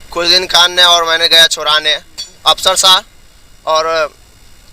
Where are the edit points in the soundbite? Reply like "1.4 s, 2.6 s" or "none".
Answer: 2.3 s